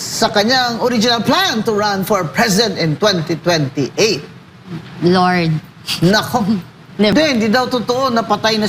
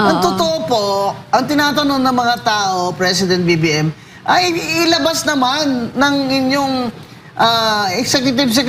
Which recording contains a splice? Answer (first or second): first